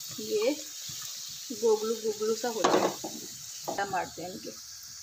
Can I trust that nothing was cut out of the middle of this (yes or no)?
no